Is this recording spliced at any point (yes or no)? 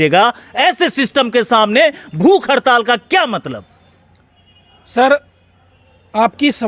no